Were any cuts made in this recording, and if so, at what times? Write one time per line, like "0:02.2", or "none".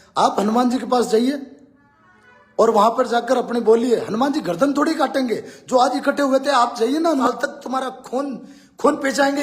0:07.3